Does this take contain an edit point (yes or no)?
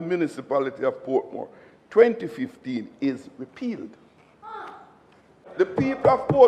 yes